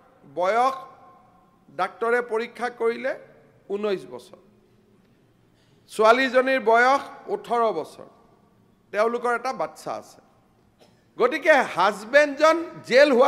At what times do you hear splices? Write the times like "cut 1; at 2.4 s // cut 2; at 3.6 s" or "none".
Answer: none